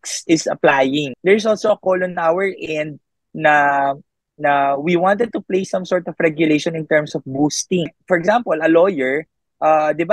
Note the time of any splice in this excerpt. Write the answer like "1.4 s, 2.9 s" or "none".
1.1 s, 8.0 s

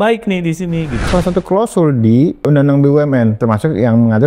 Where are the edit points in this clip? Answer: 0.9 s, 2.5 s, 3.4 s

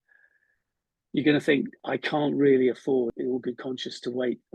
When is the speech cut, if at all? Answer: 1.8 s, 3.1 s

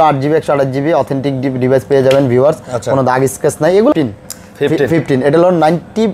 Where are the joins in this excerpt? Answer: 3.9 s

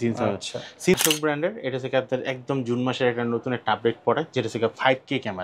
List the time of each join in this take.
0.9 s

